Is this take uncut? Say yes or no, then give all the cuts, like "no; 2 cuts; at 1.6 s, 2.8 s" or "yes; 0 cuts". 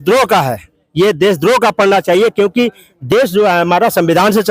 yes; 0 cuts